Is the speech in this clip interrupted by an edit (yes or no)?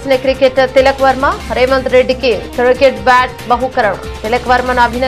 no